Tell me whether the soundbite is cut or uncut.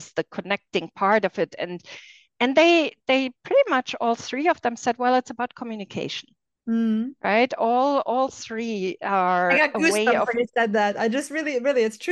uncut